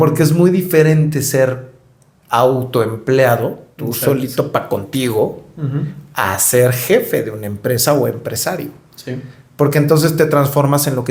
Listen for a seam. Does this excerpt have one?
no; 0 cuts

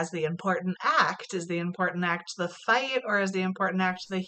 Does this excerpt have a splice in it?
no; 0 cuts

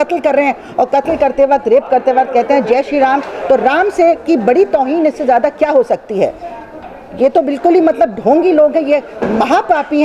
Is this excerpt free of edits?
yes; 0 cuts

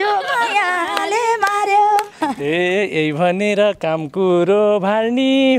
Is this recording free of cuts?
no; 1 cut; at 2.1 s

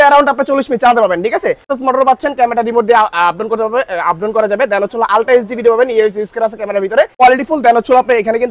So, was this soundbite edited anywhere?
yes; 2 cuts; at 1.7 s, 7.1 s

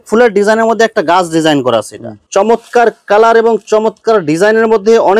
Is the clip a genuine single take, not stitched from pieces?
no; 1 cut; at 2.2 s

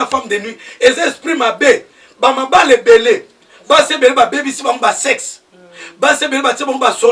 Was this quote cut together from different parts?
no; 0 cuts

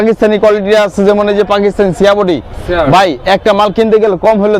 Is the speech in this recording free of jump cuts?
yes; 0 cuts

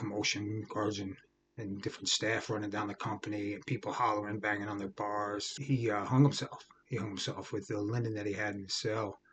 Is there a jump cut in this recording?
yes; 1 cut; at 5.5 s

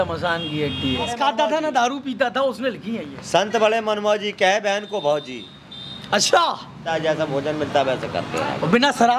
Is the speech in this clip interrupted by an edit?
yes; 2 cuts; at 1.1 s, 6.9 s

